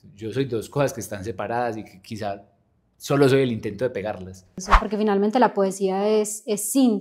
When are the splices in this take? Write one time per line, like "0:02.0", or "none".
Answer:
0:04.7